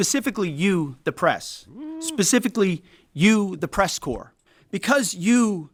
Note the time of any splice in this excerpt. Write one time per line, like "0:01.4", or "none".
none